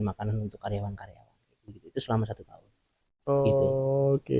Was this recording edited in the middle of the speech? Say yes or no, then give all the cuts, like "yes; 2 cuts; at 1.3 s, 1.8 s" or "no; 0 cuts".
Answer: no; 0 cuts